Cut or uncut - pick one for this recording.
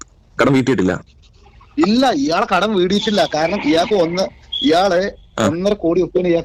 uncut